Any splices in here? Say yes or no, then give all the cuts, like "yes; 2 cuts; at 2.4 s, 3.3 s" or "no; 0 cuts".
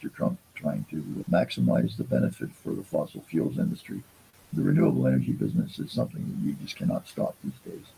no; 0 cuts